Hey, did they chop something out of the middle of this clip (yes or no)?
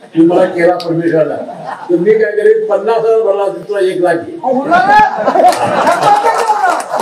no